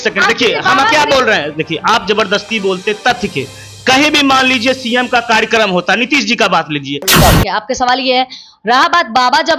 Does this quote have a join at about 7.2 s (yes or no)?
yes